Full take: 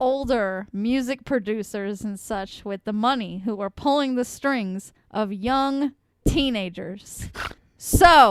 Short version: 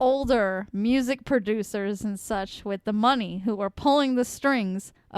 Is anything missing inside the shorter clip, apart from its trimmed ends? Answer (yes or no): no